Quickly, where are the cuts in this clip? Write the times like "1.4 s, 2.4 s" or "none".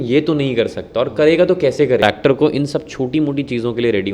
2.0 s